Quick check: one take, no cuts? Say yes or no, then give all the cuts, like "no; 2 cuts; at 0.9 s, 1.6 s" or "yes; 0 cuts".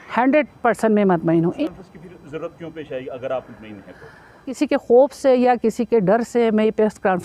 no; 2 cuts; at 1.6 s, 4.6 s